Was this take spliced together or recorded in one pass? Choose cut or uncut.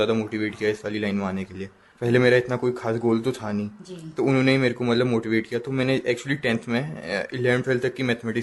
uncut